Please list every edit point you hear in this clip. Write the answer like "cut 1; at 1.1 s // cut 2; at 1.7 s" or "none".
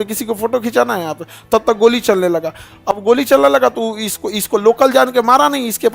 none